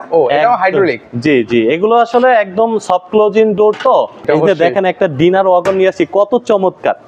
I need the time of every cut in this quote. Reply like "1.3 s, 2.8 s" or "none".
4.2 s